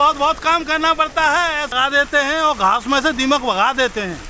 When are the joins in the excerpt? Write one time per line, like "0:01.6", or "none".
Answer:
0:01.7